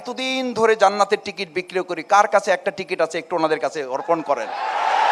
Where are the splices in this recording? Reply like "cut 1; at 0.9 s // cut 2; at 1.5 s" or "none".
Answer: none